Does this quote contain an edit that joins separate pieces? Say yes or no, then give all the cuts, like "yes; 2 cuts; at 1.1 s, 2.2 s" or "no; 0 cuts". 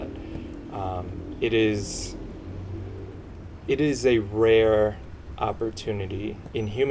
no; 0 cuts